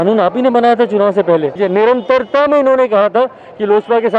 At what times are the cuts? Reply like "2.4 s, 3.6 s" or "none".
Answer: 1.6 s